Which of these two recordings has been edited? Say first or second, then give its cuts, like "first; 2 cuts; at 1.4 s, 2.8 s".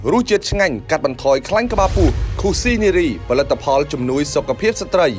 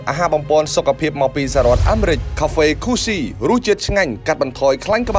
second; 1 cut; at 2.3 s